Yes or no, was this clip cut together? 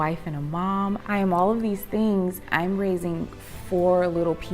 yes